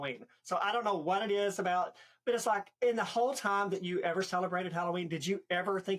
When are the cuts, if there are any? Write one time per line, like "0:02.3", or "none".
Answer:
0:02.7